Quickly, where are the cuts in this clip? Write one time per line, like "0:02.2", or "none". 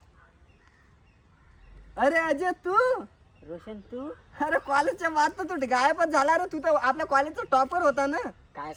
none